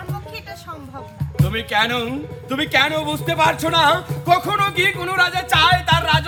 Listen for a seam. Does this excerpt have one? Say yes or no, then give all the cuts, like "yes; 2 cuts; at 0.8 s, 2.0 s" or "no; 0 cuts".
no; 0 cuts